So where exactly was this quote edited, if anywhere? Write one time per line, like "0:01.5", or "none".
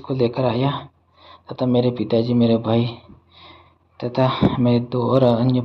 none